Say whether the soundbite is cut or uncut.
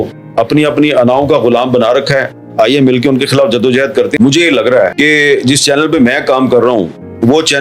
cut